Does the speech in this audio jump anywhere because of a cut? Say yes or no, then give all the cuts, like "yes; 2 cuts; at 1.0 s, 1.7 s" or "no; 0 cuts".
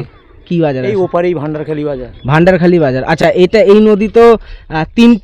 no; 0 cuts